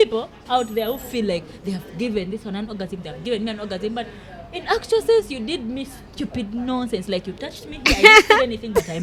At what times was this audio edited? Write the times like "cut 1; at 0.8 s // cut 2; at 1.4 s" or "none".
none